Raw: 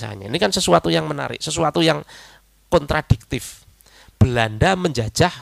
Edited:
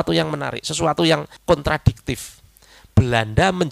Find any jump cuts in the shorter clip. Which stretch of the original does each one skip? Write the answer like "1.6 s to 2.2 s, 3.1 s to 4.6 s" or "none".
2.1 s to 2.6 s

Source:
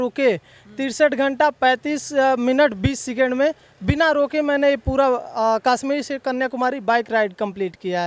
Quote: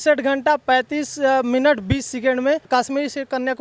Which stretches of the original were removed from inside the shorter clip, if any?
3.6 s to 5.6 s

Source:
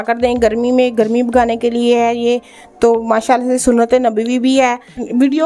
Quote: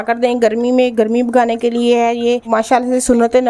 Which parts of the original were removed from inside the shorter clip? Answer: 2.5 s to 3.0 s

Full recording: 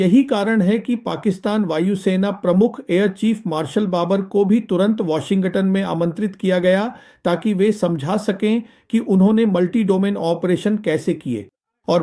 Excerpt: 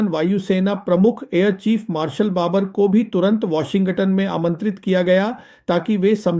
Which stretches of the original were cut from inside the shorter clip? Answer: none

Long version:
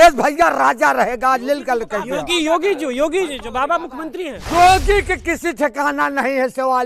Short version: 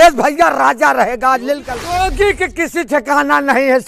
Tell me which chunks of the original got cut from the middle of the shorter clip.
1.7 s to 4.4 s

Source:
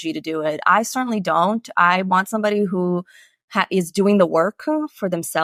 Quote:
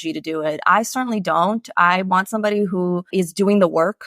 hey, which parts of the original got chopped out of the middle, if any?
3.1 s to 3.7 s

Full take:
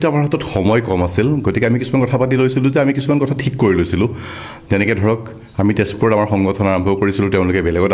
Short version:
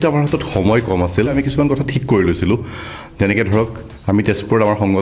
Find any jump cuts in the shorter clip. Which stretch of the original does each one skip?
1.3 s to 2.8 s

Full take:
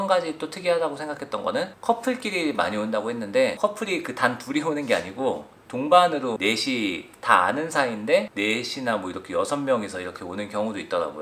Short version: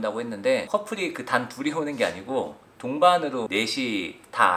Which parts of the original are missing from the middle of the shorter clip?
none

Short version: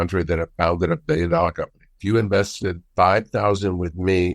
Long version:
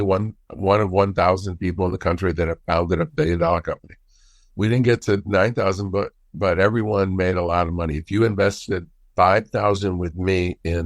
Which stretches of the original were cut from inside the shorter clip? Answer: 4.0 s to 8.0 s, 8.9 s to 9.0 s

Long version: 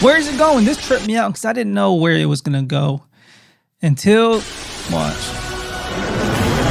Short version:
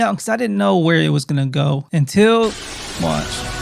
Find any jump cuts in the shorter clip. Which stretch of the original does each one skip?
3.0 s to 3.7 s

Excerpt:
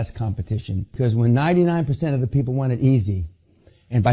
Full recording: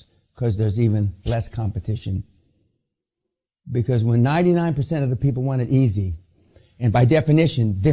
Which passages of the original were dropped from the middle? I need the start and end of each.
2.3 s to 3.9 s

